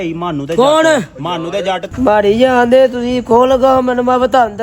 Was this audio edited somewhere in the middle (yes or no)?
yes